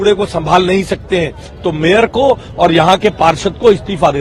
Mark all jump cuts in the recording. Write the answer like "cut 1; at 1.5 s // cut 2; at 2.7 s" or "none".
none